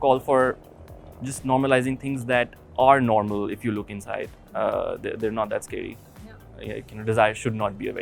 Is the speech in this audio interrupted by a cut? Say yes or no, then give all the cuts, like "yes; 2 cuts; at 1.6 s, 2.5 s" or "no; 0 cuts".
no; 0 cuts